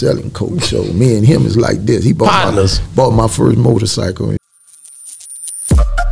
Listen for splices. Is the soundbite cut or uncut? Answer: cut